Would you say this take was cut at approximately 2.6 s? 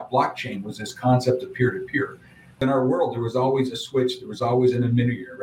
yes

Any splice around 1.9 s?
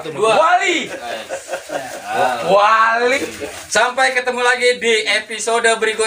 no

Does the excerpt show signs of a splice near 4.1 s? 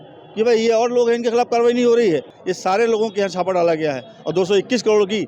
no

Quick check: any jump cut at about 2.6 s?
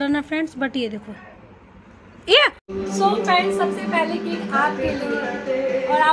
yes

